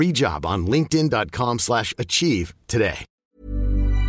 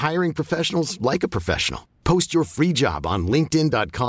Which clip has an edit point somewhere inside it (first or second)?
first